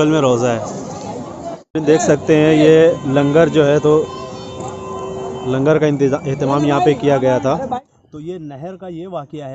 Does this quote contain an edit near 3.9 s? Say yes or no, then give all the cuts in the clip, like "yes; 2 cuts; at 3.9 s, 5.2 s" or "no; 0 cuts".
no; 2 cuts; at 1.6 s, 7.8 s